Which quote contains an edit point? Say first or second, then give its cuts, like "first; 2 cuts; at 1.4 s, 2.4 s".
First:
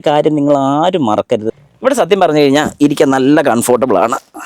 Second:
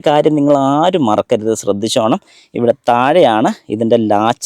first; 1 cut; at 1.5 s